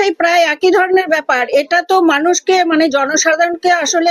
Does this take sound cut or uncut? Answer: uncut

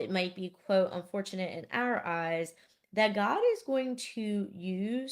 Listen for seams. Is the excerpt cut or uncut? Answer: uncut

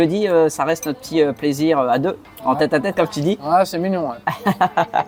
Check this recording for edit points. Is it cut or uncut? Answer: uncut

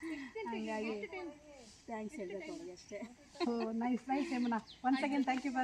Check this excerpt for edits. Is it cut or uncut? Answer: uncut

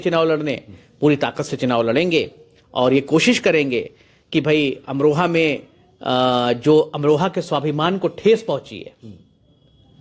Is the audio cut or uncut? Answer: uncut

